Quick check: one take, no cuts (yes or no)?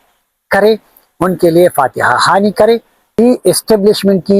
no